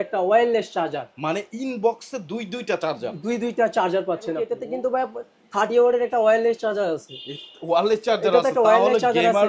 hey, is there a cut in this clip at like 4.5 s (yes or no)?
yes